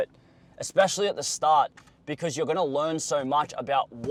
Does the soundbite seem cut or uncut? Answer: uncut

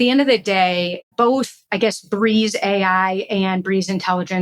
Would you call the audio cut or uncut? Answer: cut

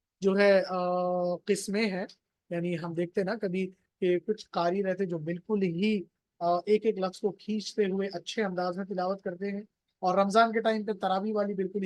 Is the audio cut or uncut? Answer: uncut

